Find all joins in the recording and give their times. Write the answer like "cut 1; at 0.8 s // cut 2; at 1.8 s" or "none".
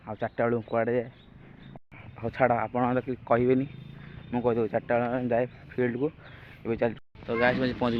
cut 1; at 1.7 s // cut 2; at 7.0 s